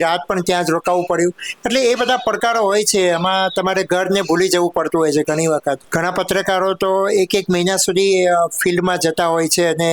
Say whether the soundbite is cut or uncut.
cut